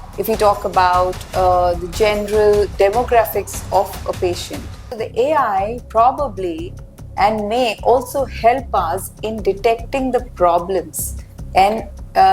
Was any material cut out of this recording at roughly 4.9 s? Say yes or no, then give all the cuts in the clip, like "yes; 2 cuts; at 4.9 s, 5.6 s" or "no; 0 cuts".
yes; 1 cut; at 4.9 s